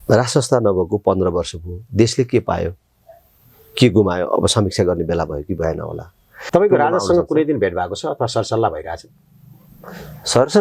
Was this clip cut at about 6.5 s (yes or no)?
yes